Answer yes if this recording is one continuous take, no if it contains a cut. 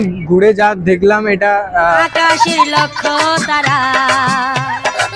no